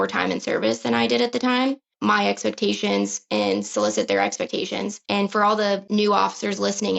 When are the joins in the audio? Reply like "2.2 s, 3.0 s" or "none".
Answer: 5.0 s, 5.8 s